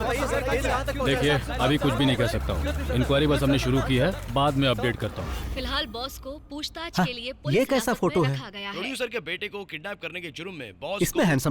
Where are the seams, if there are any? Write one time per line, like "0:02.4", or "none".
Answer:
none